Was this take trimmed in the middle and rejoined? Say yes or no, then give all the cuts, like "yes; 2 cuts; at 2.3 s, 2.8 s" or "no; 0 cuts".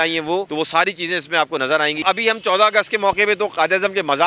yes; 1 cut; at 2.0 s